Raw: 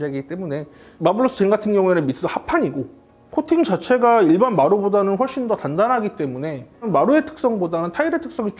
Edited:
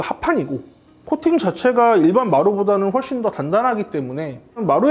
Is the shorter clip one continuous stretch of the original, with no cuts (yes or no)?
yes